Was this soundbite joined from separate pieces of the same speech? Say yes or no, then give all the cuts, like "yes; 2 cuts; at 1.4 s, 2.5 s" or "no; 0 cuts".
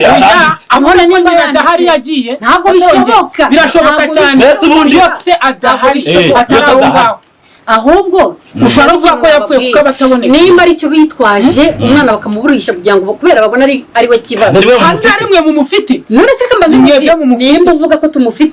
no; 0 cuts